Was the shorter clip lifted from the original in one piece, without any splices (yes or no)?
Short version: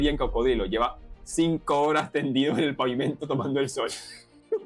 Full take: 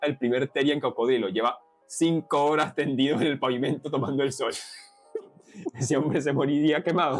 yes